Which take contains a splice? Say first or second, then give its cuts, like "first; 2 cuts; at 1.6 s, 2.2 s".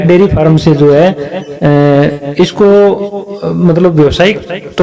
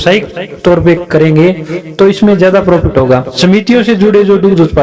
second; 1 cut; at 3.3 s